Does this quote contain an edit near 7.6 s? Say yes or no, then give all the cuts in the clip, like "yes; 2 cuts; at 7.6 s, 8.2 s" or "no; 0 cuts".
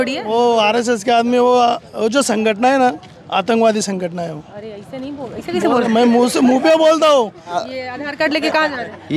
yes; 1 cut; at 7.6 s